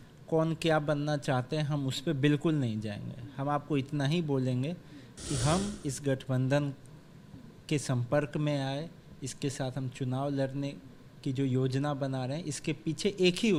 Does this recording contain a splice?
no; 0 cuts

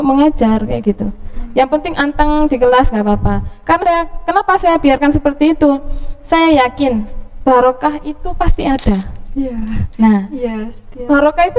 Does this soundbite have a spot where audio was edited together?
yes; 1 cut; at 3.8 s

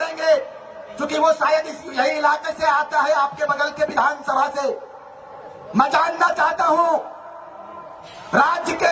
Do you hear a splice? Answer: no; 0 cuts

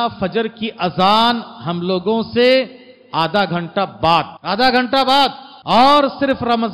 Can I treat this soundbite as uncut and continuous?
no; 2 cuts; at 4.4 s, 5.5 s

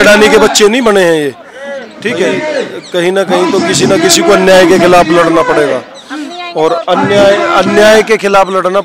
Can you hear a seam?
yes; 1 cut; at 2.2 s

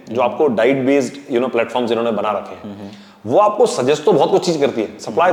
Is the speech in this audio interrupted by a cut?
no; 0 cuts

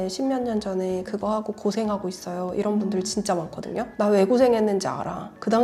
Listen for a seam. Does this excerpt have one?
no; 0 cuts

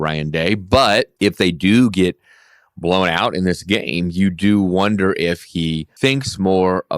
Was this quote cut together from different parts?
yes; 2 cuts; at 1.1 s, 5.9 s

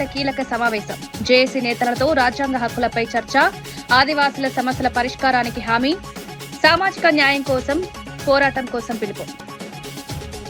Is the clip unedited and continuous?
yes; 0 cuts

